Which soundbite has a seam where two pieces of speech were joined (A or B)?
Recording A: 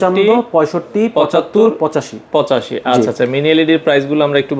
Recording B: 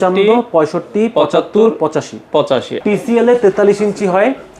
B